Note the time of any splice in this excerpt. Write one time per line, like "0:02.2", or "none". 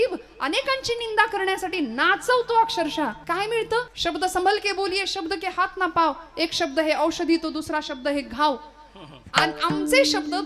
0:03.2
0:03.9

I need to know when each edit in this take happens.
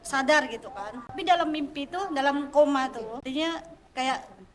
0:01.2
0:03.2

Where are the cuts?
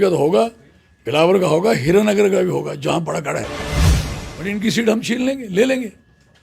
0:03.5
0:04.3

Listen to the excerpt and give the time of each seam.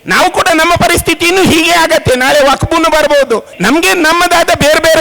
0:03.5

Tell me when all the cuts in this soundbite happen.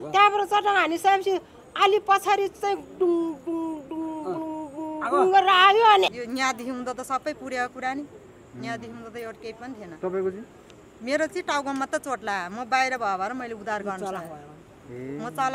0:06.1

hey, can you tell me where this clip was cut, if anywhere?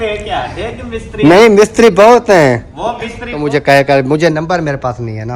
0:03.4

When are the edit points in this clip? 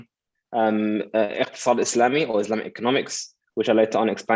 none

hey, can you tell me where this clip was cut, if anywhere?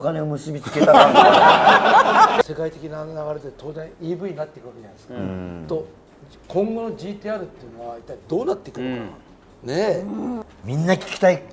0:02.4
0:10.5

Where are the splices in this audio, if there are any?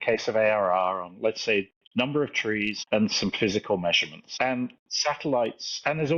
0:01.8
0:02.8
0:04.2
0:04.9

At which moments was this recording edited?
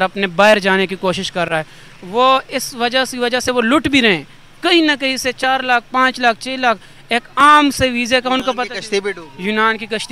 none

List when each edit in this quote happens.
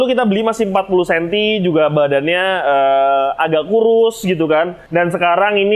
0:04.8

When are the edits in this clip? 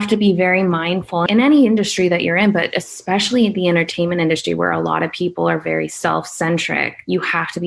0:01.3

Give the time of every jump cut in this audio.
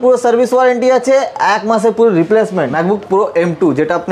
0:02.6

